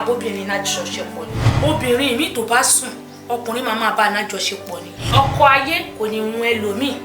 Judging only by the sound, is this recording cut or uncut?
cut